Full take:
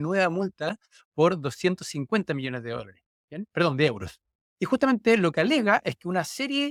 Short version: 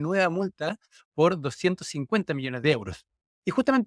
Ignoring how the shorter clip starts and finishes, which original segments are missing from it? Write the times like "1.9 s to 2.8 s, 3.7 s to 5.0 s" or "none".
2.6 s to 3.8 s